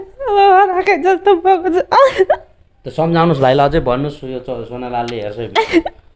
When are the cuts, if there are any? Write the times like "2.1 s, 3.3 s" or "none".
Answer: none